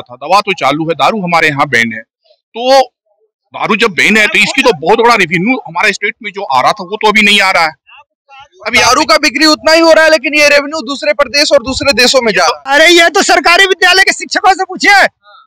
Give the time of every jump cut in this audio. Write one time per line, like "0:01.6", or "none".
0:12.6